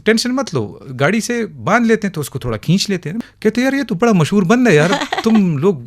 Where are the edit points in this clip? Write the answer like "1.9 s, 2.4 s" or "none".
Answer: 3.2 s